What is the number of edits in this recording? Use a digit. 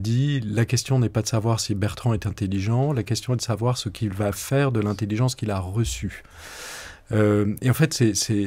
1